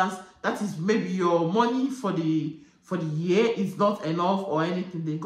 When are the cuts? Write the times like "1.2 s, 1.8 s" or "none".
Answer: none